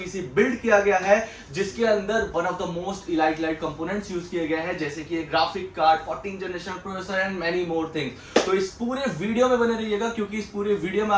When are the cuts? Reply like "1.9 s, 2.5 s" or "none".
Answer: none